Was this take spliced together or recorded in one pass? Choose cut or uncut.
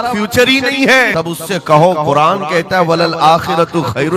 cut